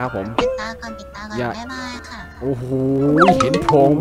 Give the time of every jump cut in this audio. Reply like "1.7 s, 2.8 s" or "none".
none